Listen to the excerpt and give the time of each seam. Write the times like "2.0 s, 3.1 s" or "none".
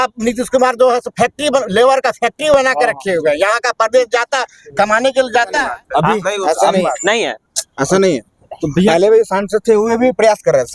5.6 s

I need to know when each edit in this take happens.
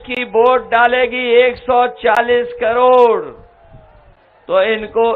none

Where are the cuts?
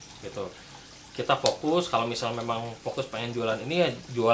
none

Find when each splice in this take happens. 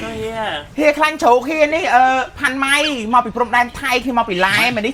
none

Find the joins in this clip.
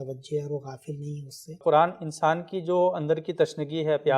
1.6 s

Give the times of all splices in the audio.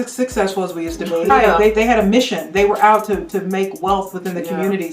1.3 s

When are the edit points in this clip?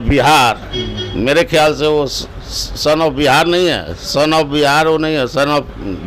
none

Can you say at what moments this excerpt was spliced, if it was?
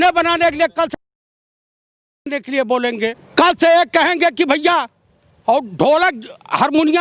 3.2 s

